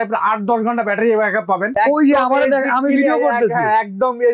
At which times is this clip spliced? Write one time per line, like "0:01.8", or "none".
0:01.7